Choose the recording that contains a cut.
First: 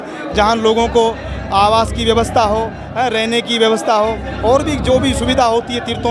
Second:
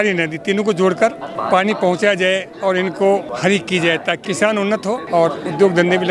second; 3 cuts; at 1.3 s, 3.3 s, 4.7 s

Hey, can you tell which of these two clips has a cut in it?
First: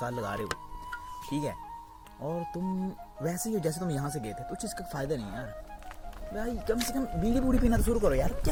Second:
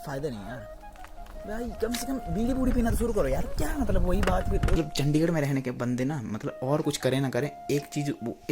second; 1 cut; at 4.7 s

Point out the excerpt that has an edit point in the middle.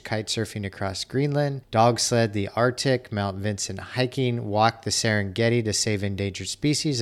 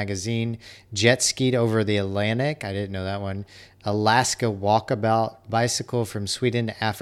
first; 1 cut; at 1.6 s

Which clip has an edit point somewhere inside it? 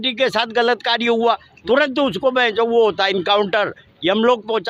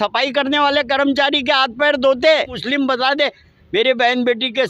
second; 1 cut; at 2.6 s

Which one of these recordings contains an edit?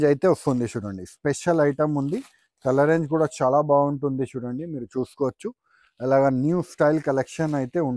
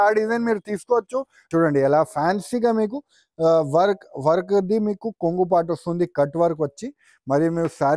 second; 1 cut; at 1.5 s

